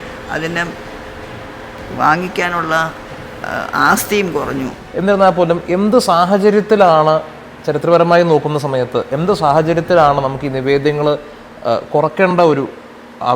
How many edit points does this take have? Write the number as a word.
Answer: one